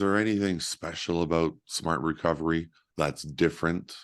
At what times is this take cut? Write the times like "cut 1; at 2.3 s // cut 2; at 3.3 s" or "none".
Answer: cut 1; at 2.8 s